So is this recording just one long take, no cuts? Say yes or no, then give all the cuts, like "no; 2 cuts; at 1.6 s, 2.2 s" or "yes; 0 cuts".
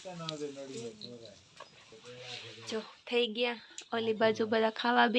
no; 1 cut; at 2.0 s